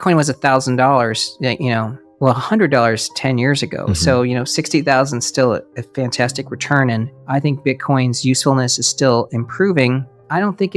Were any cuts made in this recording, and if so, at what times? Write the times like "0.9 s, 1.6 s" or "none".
2.0 s, 7.2 s